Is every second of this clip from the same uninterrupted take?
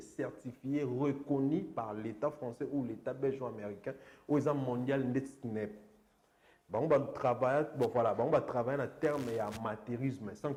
yes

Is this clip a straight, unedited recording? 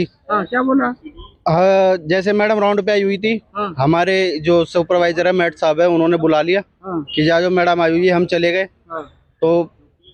yes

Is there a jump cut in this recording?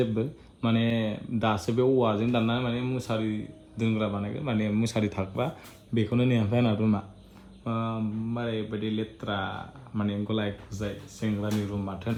no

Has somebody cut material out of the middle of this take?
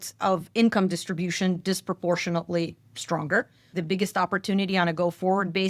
yes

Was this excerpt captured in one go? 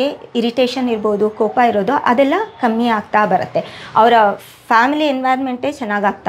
yes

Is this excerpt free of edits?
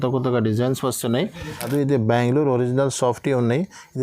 no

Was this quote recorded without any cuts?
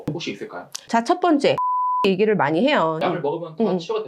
no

